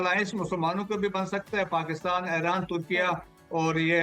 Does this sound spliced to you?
no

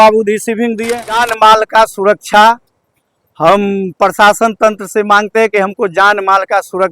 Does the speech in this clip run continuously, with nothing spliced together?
no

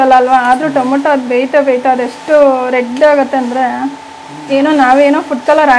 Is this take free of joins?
yes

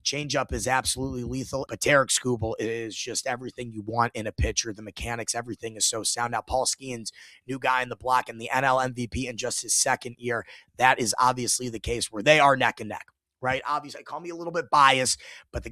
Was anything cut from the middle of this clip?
yes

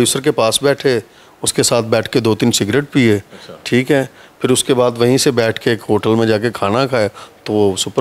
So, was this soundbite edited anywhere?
no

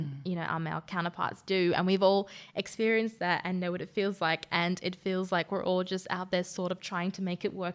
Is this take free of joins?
yes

